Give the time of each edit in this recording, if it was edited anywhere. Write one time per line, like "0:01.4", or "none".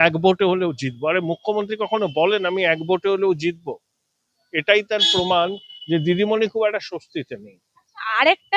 none